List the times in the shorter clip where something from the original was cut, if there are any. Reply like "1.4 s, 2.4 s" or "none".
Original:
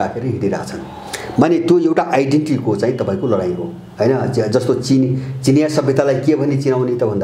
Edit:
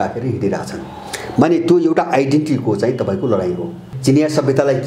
3.8 s